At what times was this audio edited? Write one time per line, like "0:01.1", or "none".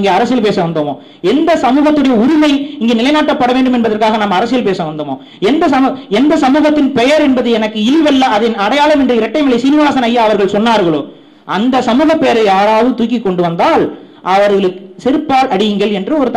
none